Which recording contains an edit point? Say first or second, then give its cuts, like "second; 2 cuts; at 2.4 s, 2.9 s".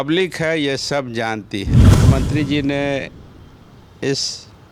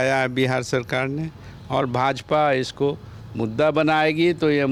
first; 1 cut; at 1.9 s